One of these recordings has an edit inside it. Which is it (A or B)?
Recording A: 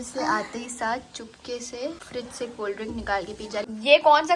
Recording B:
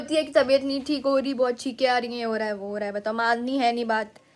A